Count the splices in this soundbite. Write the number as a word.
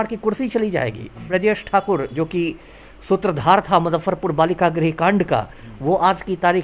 one